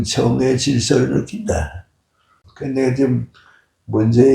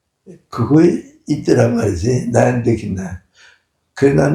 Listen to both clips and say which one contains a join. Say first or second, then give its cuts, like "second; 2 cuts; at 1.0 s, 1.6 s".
first; 1 cut; at 2.4 s